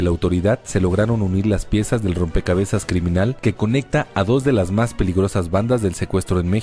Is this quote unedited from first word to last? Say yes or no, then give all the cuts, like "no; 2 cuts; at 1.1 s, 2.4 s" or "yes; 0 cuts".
no; 1 cut; at 4.9 s